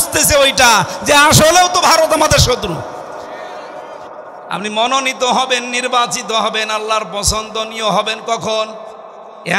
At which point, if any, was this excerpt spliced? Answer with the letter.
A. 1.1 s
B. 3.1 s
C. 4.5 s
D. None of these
C